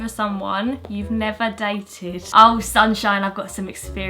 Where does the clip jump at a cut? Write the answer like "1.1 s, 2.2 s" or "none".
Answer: 2.2 s